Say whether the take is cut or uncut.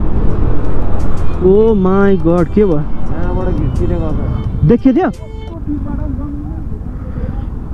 uncut